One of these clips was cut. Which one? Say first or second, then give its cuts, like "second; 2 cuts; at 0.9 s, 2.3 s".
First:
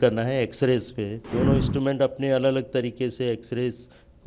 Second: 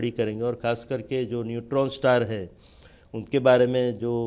first; 1 cut; at 1.2 s